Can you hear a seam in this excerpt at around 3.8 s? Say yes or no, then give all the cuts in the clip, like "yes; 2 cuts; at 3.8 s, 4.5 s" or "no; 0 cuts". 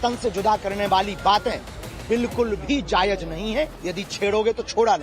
yes; 1 cut; at 3.8 s